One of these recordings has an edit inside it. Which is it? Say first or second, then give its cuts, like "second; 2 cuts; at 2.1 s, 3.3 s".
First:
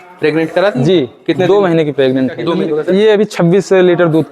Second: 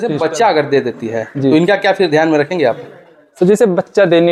first; 1 cut; at 2.6 s